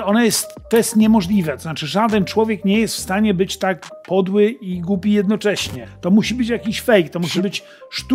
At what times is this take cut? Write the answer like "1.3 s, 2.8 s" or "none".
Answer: 5.8 s

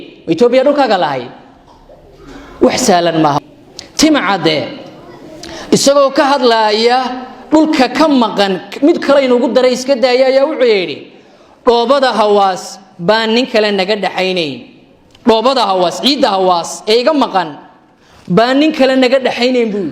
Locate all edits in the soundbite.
3.4 s

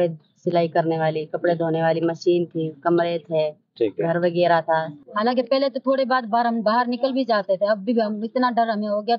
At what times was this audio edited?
4.9 s

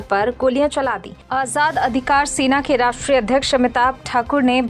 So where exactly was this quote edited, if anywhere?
1.1 s

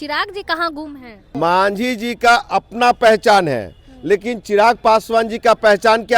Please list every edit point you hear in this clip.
1.3 s

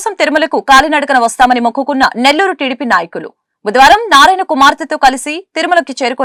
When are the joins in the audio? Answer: none

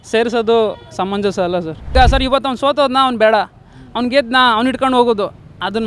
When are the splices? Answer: 1.9 s

